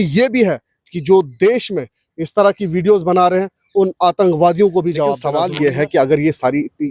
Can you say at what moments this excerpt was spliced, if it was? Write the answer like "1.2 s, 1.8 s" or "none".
5.2 s